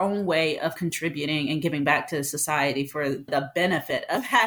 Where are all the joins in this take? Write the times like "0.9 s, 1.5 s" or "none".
3.3 s